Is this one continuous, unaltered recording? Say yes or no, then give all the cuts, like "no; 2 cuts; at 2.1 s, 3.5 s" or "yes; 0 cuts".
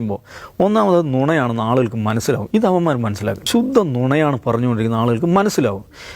no; 1 cut; at 3.4 s